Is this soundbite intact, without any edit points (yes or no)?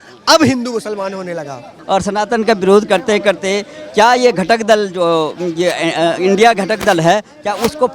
yes